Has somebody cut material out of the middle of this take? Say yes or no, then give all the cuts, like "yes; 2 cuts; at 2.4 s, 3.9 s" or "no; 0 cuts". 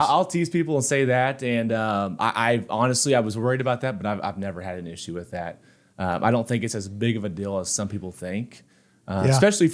no; 0 cuts